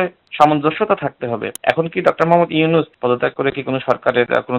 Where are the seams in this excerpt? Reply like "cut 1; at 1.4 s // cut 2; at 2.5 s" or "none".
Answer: cut 1; at 1.5 s // cut 2; at 2.9 s